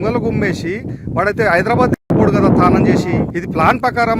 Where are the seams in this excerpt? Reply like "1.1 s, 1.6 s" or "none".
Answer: 3.3 s